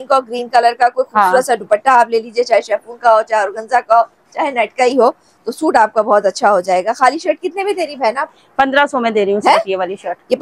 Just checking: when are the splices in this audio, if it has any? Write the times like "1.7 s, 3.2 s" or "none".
none